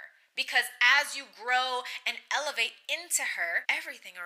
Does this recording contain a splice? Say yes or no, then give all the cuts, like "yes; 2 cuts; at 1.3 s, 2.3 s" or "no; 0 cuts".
no; 0 cuts